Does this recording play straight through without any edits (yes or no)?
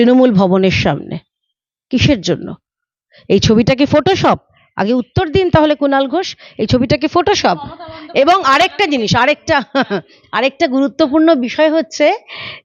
yes